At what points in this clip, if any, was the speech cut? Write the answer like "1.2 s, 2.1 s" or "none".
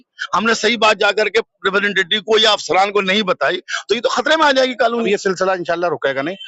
5.1 s

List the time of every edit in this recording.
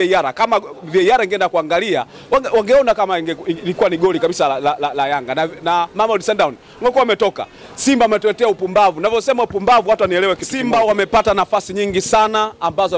10.5 s

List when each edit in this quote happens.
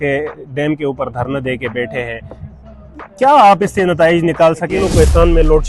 4.8 s

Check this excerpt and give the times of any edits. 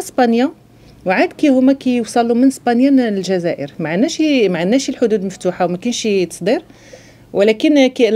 none

